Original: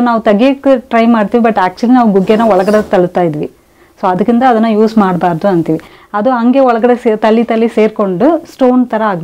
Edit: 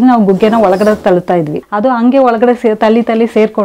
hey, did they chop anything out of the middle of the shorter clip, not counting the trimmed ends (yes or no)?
yes